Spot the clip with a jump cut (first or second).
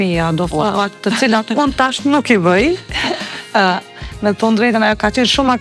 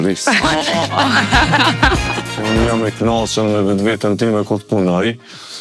second